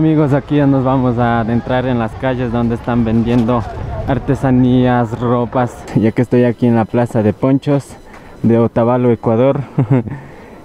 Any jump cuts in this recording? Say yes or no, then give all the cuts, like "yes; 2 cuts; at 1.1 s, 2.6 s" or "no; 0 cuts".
yes; 1 cut; at 5.8 s